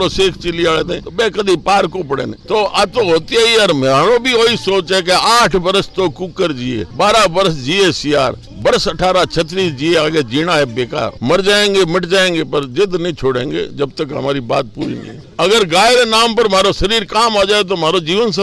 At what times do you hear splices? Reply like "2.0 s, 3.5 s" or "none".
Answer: 2.4 s, 11.2 s, 15.2 s